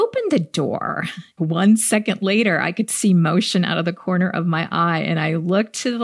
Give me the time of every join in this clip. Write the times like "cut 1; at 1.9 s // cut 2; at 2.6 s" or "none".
cut 1; at 1.3 s